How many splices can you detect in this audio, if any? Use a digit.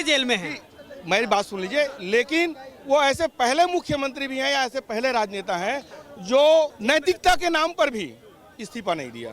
1